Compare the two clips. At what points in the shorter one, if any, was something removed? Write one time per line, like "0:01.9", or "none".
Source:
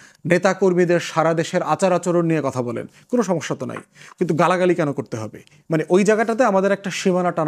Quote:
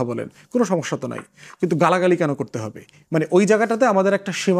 none